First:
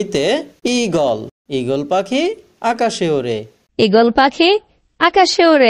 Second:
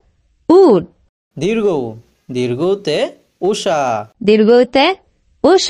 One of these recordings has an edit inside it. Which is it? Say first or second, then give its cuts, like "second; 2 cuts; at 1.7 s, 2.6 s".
first; 1 cut; at 1.4 s